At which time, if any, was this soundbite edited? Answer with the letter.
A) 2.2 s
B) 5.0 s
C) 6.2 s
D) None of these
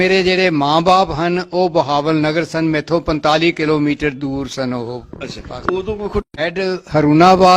C